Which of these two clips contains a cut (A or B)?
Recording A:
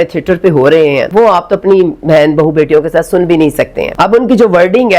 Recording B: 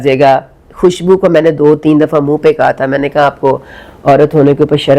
A